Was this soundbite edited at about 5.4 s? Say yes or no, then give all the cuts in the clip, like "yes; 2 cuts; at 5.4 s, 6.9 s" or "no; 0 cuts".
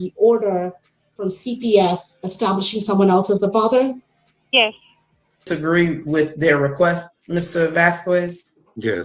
yes; 1 cut; at 5.4 s